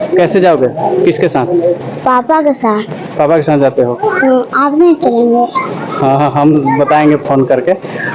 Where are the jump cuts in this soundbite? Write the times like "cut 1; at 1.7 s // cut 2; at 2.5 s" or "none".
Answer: none